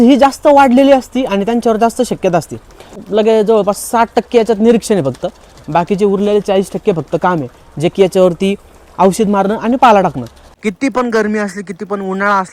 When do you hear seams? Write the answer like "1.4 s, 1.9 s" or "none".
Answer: 3.0 s, 10.4 s